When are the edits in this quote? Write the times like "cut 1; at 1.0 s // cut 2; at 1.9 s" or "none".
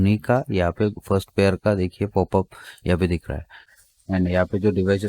cut 1; at 3.7 s